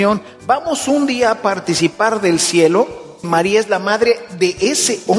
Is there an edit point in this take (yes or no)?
yes